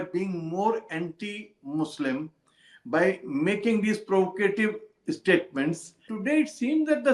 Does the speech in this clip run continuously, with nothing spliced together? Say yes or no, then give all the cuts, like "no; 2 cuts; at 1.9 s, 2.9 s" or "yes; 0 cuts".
no; 1 cut; at 6.1 s